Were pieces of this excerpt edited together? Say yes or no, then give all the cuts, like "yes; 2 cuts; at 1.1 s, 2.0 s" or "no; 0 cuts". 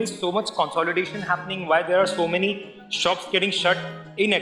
no; 0 cuts